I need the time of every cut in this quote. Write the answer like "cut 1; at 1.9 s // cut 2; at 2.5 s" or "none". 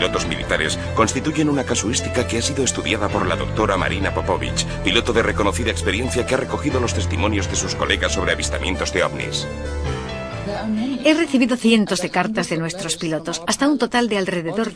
cut 1; at 11.3 s